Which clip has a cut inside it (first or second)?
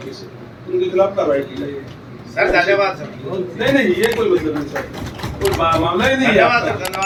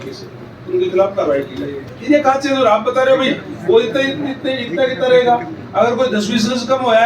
second